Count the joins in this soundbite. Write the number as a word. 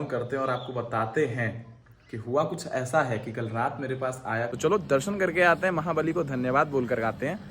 one